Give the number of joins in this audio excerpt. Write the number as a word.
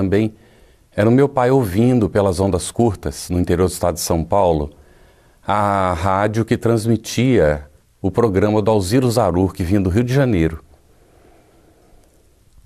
one